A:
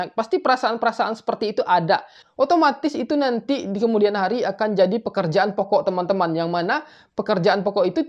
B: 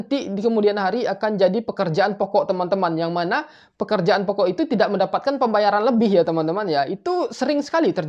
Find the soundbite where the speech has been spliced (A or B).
A